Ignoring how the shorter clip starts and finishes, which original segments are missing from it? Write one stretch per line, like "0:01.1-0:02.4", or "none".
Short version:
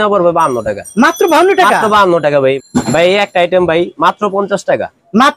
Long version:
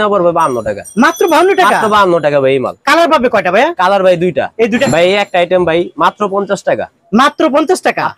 0:02.8-0:04.8